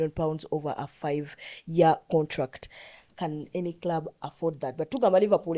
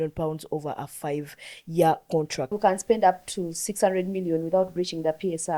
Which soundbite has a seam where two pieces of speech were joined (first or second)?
second